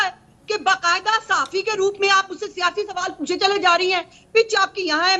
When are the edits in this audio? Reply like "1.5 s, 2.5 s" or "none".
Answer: none